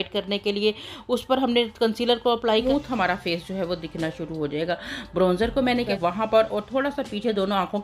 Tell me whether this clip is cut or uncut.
cut